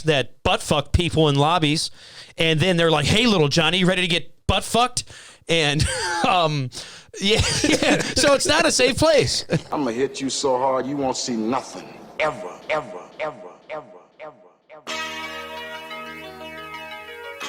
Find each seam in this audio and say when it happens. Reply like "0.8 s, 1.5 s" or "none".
9.7 s